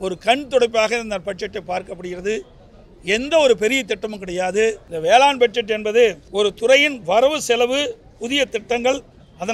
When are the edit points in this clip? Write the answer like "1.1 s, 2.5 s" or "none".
4.9 s, 6.2 s